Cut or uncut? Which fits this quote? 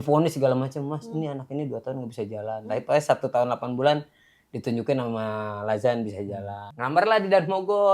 cut